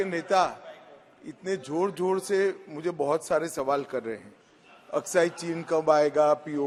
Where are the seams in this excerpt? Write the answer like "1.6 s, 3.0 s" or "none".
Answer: none